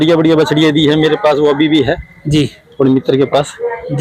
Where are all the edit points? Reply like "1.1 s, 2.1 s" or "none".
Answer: none